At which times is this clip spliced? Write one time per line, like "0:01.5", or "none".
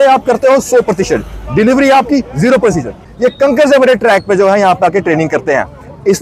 0:03.1